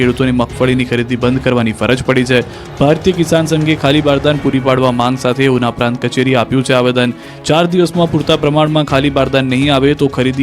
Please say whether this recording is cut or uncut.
cut